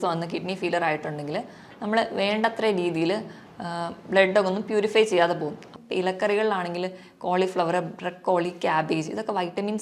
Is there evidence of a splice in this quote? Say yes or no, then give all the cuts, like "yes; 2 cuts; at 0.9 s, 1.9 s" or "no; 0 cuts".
yes; 1 cut; at 5.7 s